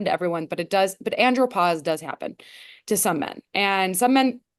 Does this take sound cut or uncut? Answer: uncut